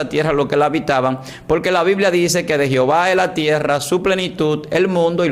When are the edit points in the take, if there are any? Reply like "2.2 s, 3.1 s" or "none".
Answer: none

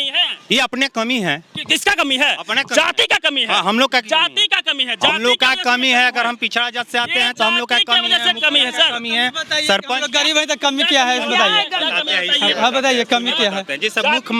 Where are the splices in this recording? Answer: none

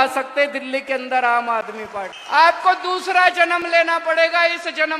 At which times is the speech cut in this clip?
2.2 s

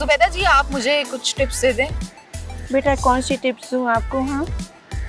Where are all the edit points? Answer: none

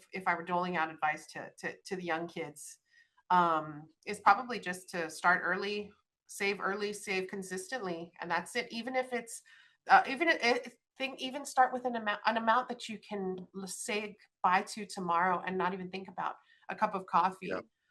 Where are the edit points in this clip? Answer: none

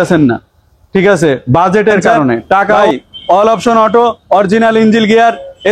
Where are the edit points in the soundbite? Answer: 2.8 s

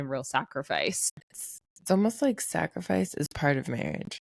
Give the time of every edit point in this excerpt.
1.1 s

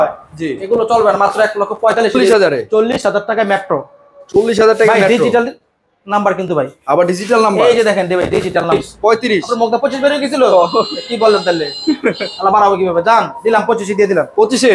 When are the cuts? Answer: 2.2 s, 8.7 s

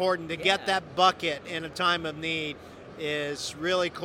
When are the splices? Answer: none

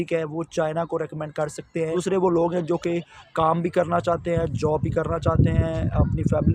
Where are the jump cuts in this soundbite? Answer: 1.9 s

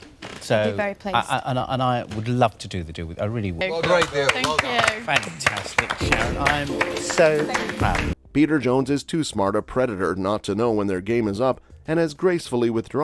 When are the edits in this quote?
none

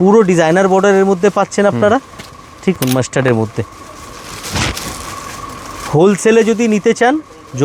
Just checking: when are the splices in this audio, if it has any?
2.8 s

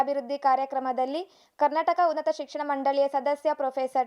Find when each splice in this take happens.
none

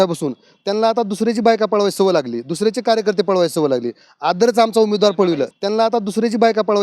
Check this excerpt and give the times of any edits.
5.5 s

